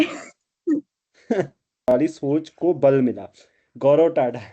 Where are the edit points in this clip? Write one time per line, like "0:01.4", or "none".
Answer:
0:01.9